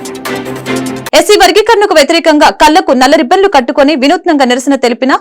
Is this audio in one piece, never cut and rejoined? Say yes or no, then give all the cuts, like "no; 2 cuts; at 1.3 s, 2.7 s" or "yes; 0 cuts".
no; 1 cut; at 1.0 s